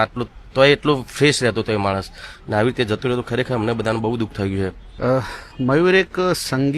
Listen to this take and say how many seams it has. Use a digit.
1